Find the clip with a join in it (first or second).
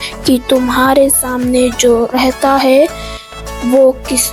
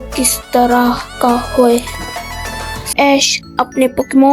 second